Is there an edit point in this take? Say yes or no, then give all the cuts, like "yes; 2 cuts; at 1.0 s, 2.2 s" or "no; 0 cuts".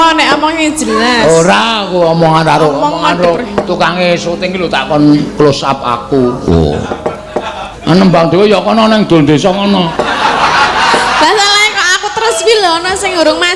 yes; 1 cut; at 7.6 s